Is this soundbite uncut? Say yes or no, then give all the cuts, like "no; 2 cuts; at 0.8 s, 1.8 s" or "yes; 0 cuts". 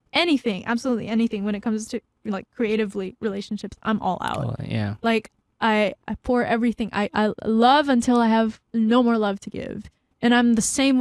yes; 0 cuts